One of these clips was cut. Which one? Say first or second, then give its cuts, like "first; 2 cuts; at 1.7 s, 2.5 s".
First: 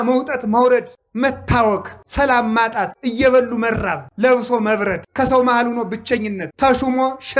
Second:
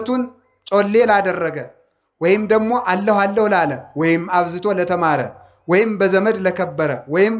first; 6 cuts; at 1.0 s, 2.0 s, 3.0 s, 4.0 s, 5.0 s, 6.4 s